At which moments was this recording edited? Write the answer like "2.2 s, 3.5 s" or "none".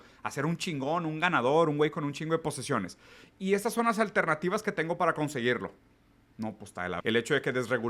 7.0 s